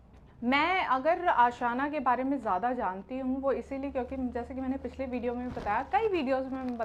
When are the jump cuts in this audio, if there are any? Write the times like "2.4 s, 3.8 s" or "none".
none

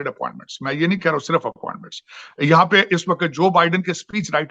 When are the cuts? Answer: none

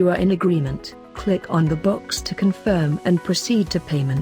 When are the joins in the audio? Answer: none

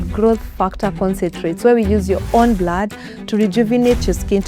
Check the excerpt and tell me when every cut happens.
none

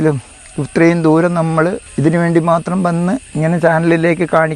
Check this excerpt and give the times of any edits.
1.9 s, 3.3 s

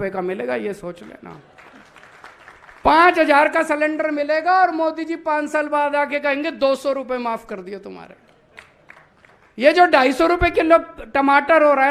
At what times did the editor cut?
none

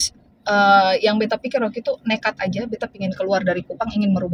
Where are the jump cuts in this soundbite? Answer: none

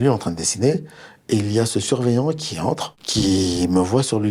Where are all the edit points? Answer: none

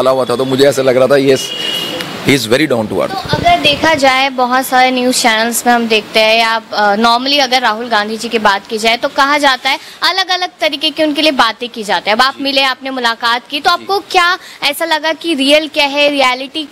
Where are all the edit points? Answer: none

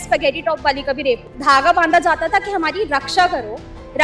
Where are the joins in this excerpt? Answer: 1.3 s

